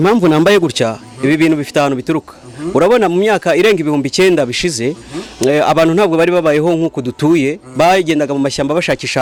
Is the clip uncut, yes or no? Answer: yes